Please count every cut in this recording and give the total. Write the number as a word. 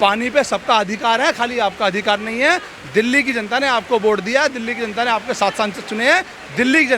zero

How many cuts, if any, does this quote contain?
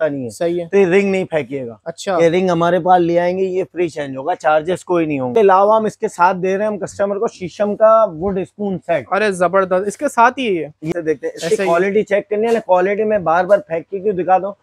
two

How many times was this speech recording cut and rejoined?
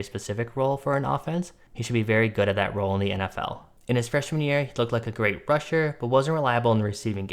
one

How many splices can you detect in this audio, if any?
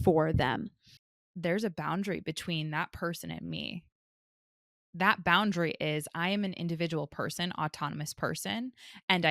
one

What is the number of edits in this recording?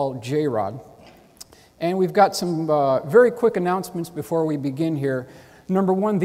one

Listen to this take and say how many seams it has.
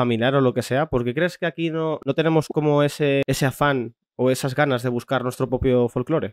two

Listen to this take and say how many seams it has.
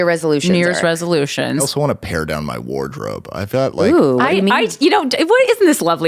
one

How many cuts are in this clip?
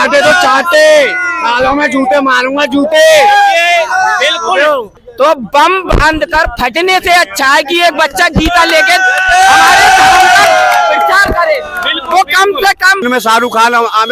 two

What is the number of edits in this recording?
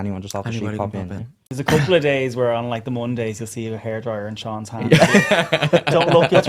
one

